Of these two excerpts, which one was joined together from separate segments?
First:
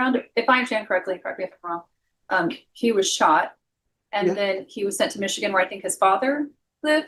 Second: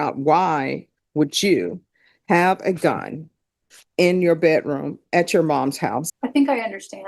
second; 1 cut; at 6.0 s

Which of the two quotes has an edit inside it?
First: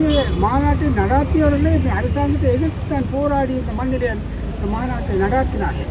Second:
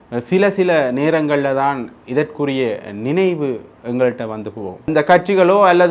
second; 1 cut; at 4.9 s

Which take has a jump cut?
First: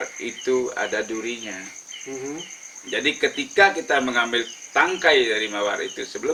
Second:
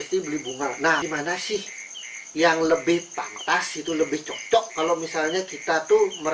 second; 1 cut; at 1.0 s

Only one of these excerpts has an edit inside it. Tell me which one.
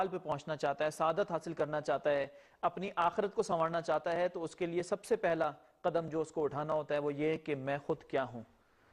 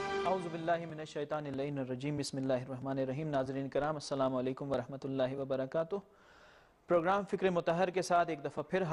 first; 1 cut; at 4.1 s

